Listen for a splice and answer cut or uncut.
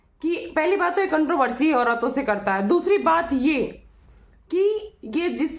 uncut